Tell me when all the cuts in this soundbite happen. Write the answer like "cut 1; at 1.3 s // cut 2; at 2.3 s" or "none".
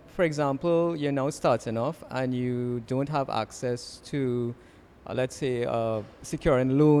none